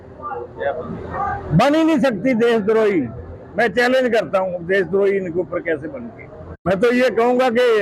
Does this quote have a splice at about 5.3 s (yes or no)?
no